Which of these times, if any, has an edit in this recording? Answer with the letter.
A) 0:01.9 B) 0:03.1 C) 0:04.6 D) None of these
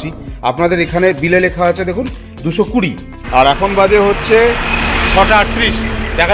B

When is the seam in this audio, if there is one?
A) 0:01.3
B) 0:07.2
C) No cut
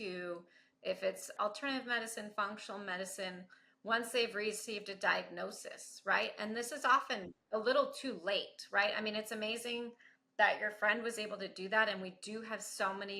A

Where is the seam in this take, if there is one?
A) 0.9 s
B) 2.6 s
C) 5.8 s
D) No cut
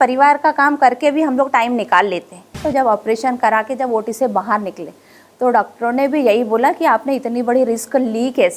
B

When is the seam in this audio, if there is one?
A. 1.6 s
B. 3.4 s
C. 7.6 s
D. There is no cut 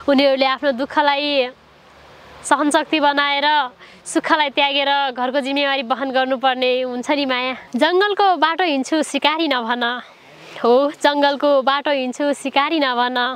C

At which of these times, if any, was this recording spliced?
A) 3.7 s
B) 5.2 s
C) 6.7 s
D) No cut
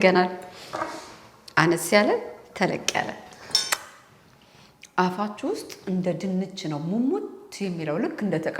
A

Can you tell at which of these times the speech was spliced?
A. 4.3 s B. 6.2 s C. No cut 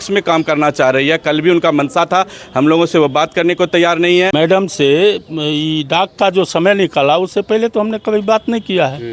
A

